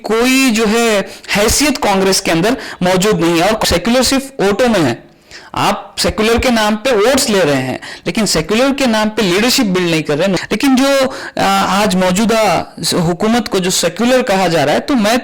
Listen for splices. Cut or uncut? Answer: cut